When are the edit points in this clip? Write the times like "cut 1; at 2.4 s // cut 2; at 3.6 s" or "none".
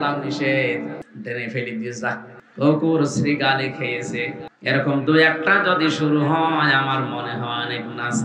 cut 1; at 1.0 s // cut 2; at 2.4 s // cut 3; at 4.5 s